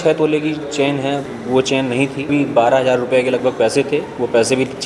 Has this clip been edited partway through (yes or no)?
yes